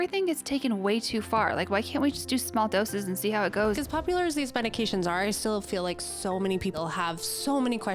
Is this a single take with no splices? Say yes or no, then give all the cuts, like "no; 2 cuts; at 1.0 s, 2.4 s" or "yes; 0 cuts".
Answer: no; 2 cuts; at 3.8 s, 6.7 s